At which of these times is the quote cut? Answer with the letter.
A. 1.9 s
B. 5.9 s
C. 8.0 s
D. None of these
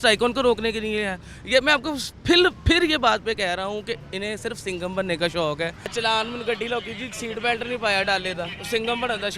B